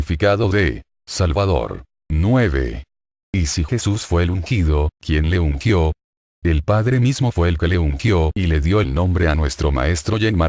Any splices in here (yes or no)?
no